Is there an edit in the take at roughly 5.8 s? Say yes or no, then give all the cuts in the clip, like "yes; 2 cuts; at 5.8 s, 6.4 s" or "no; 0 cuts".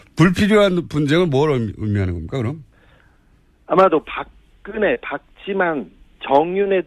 no; 1 cut; at 3.5 s